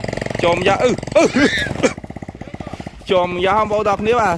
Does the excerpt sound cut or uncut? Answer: cut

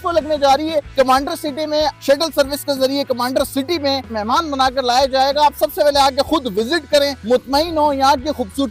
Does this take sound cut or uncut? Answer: cut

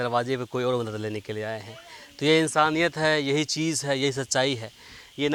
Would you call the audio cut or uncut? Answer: uncut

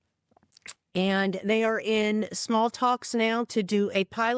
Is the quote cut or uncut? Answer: uncut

